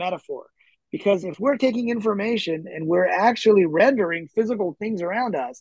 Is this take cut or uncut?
uncut